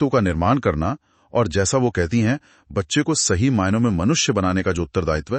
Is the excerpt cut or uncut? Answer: uncut